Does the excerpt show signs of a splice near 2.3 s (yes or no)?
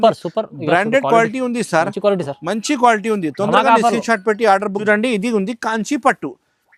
no